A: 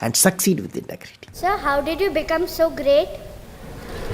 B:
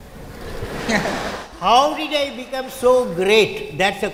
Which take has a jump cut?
A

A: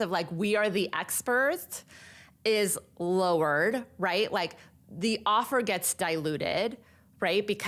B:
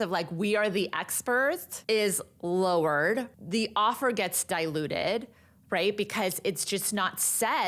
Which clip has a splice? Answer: B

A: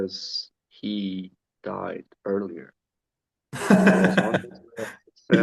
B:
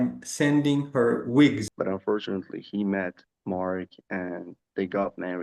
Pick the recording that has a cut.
B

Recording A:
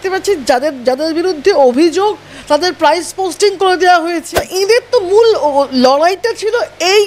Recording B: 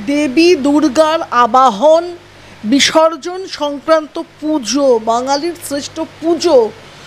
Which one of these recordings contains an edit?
A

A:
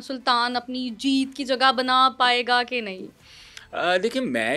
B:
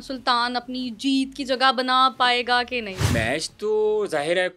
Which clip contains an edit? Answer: B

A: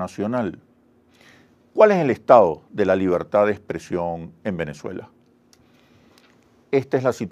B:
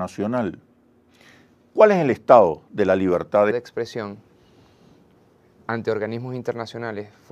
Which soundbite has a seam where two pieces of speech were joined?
A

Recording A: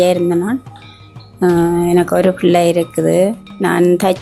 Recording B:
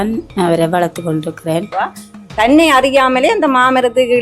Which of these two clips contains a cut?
B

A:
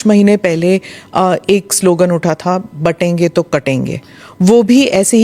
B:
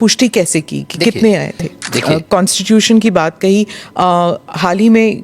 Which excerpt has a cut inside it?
B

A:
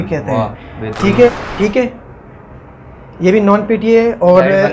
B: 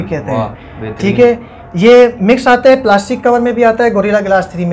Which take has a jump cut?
A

